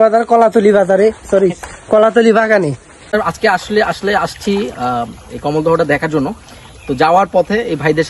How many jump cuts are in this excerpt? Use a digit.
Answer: 1